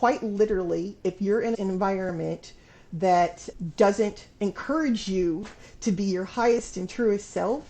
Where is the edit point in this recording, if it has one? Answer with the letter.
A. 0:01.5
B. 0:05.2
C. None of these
A